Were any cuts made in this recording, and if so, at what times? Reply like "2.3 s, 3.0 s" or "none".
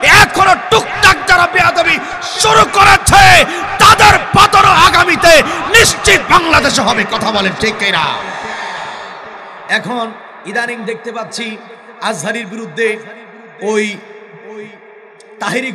9.5 s